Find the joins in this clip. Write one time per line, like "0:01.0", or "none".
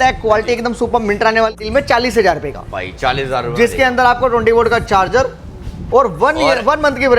0:01.5